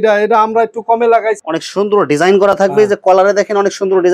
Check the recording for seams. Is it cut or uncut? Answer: cut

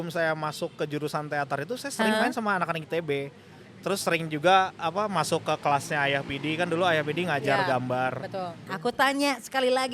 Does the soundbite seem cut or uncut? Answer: cut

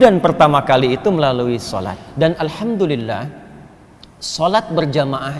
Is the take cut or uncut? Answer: cut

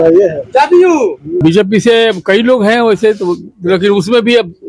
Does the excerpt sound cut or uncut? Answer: cut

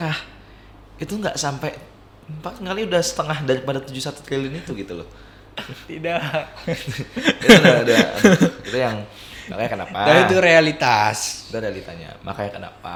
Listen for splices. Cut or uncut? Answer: uncut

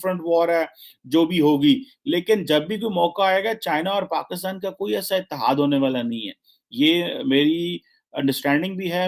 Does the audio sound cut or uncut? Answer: uncut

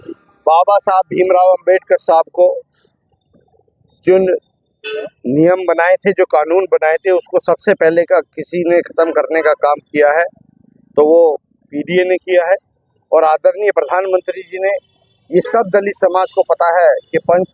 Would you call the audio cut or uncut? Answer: uncut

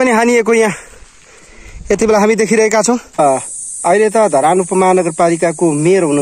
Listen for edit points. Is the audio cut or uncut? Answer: cut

